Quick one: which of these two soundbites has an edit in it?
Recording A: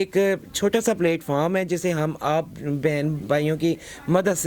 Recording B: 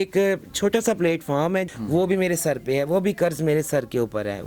B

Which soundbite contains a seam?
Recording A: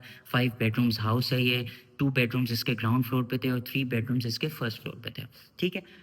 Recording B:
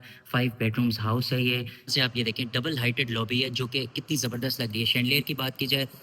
B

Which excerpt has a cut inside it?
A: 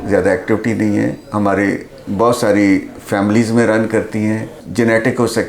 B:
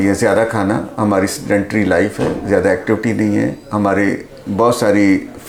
A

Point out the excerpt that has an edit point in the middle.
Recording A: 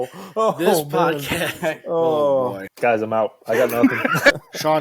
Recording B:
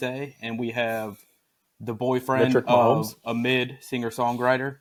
A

